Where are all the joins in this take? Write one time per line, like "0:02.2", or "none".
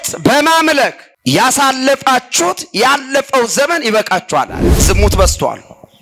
0:01.1
0:04.7

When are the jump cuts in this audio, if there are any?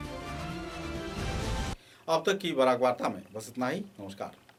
none

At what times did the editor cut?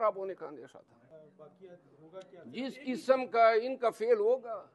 0:01.1

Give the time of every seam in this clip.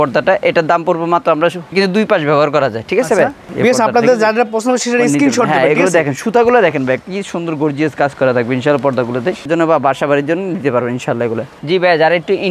0:01.7
0:03.4
0:09.5
0:11.5

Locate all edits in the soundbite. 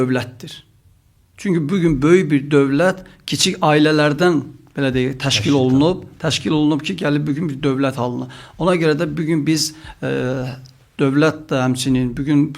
none

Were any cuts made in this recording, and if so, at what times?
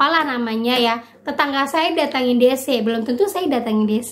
none

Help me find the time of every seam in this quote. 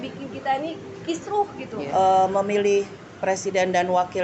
0:01.9

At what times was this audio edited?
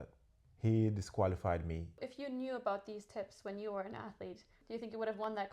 0:02.0
0:04.6

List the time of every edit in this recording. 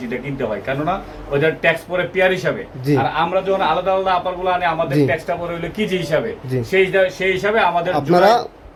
none

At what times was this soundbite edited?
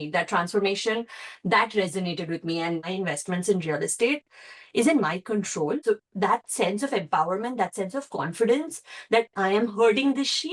0:02.9
0:05.8

